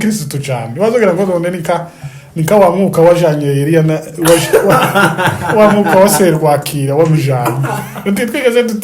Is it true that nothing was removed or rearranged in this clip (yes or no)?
yes